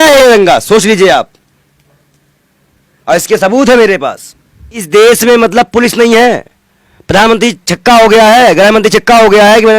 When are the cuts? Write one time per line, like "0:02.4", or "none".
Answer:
0:04.8